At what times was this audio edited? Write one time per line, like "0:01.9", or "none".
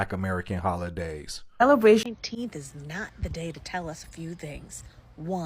0:02.0